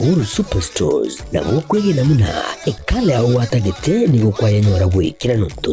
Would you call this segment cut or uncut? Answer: cut